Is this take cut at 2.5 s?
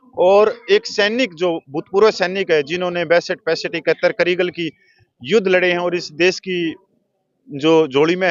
no; 0 cuts

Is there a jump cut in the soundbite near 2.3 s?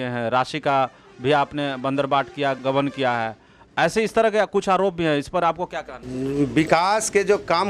no; 0 cuts

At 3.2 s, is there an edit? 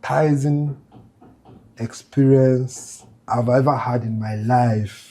yes; 1 cut; at 3.2 s

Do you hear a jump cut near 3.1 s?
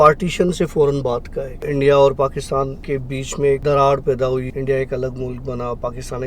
yes; 3 cuts; at 1.6 s, 3.1 s, 4.5 s

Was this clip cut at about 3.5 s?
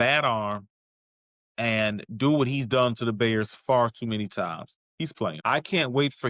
no; 1 cut; at 5.4 s

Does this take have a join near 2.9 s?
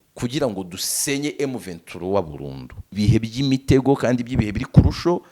yes; 1 cut; at 2.9 s

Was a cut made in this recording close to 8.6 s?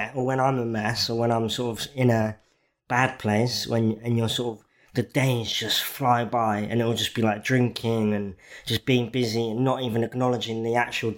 no; 0 cuts

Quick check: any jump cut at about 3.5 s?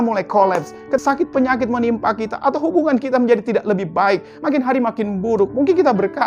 no; 1 cut; at 1.0 s

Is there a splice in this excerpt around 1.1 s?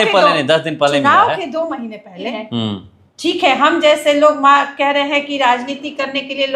no; 1 cut; at 2.3 s

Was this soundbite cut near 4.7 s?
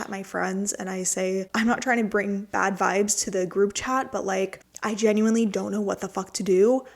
yes; 2 cuts; at 1.5 s, 4.7 s

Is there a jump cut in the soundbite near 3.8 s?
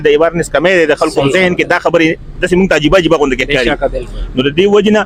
no; 0 cuts

